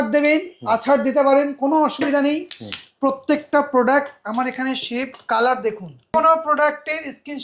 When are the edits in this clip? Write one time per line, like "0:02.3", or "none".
0:06.1